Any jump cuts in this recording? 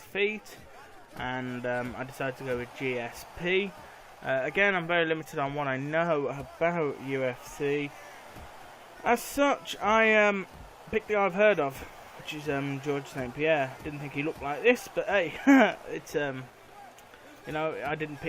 yes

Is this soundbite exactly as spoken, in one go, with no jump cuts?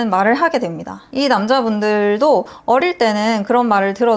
yes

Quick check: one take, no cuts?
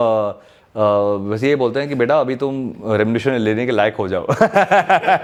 yes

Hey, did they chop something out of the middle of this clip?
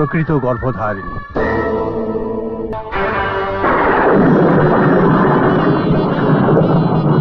yes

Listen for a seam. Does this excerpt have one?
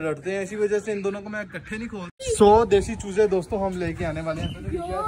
yes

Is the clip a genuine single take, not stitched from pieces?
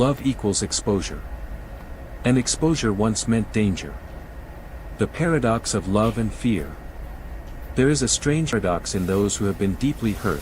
no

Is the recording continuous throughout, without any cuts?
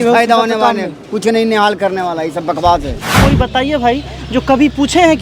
no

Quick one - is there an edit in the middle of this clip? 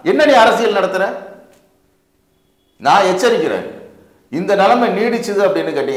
no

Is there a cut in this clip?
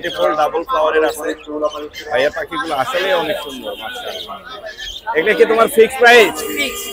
no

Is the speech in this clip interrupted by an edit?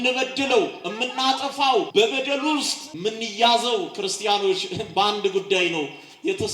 yes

